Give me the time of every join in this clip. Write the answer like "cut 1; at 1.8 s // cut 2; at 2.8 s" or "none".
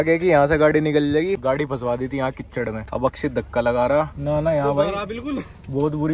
cut 1; at 4.1 s